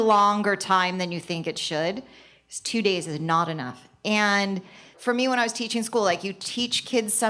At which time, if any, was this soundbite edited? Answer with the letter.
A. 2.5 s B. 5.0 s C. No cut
B